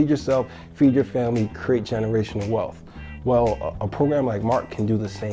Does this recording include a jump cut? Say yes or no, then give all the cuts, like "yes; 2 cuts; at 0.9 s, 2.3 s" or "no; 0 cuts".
no; 0 cuts